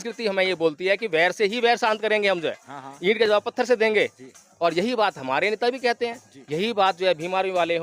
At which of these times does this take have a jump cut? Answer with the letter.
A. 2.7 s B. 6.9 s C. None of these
C